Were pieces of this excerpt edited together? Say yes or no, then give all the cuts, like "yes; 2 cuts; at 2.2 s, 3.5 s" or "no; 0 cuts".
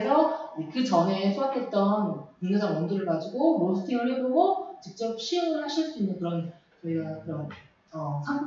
no; 0 cuts